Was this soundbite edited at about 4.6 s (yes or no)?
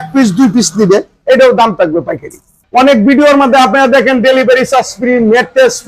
no